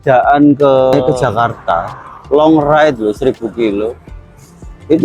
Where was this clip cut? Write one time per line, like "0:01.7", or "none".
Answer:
0:00.9